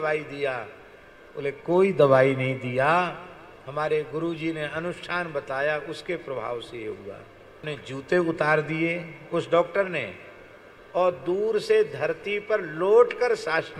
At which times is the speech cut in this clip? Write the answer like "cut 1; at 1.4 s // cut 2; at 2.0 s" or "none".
cut 1; at 7.6 s